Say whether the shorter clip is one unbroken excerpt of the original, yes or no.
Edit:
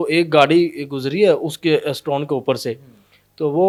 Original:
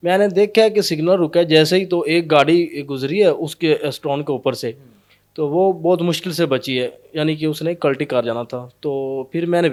yes